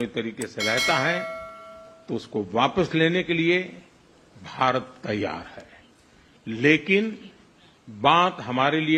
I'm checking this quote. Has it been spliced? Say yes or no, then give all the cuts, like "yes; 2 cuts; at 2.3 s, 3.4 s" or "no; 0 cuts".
no; 0 cuts